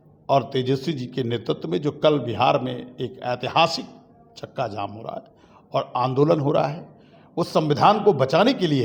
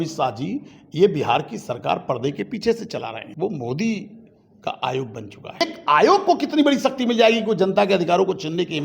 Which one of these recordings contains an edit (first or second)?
second